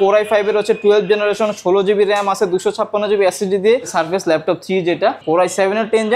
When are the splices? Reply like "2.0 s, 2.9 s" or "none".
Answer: 3.9 s, 5.2 s

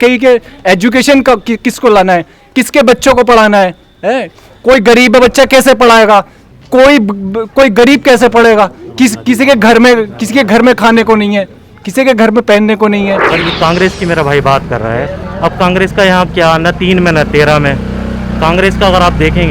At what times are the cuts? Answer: 13.3 s

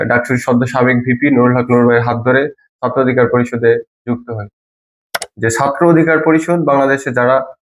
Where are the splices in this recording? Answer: 4.9 s

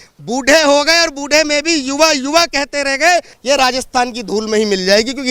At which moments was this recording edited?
3.3 s

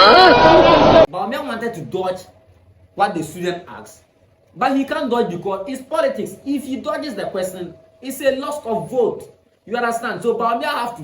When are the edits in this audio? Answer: 1.1 s

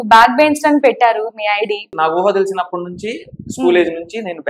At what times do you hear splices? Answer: 1.9 s

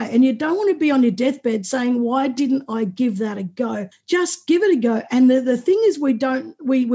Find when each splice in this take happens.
3.9 s

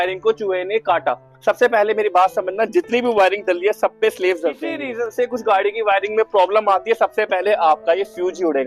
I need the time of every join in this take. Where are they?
4.9 s

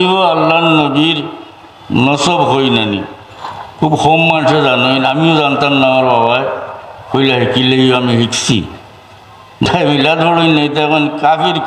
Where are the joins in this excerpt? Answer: 9.7 s

